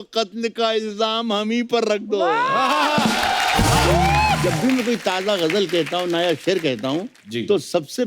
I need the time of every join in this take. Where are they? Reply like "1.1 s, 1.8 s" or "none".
4.4 s